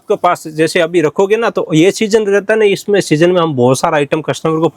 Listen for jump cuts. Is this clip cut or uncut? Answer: uncut